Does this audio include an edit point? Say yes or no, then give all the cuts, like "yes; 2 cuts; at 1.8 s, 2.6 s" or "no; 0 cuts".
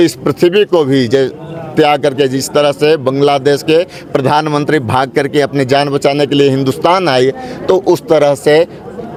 no; 0 cuts